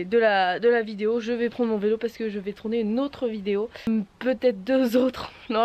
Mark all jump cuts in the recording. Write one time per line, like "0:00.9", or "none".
0:03.9